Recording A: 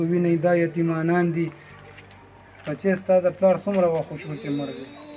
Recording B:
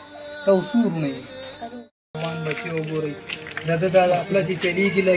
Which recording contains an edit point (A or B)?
B